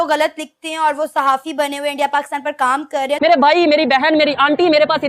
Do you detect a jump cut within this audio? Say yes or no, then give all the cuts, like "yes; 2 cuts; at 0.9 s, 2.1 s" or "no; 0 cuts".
yes; 1 cut; at 3.2 s